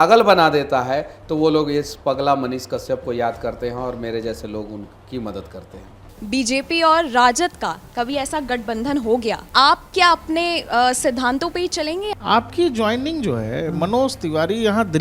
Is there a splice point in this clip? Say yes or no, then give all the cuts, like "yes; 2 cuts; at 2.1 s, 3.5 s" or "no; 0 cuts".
yes; 3 cuts; at 6.1 s, 9.4 s, 12.0 s